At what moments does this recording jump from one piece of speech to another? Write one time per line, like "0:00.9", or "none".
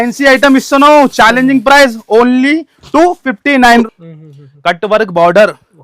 0:03.9